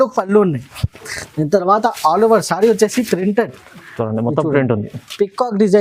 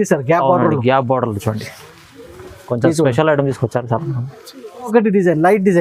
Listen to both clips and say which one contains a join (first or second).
second